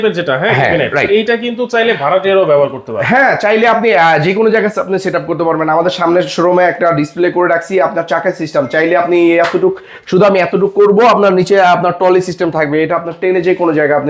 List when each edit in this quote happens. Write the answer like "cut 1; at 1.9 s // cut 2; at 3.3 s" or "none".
none